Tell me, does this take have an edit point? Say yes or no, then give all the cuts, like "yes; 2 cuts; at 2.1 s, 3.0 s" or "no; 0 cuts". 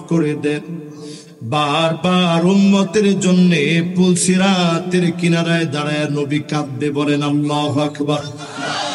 no; 0 cuts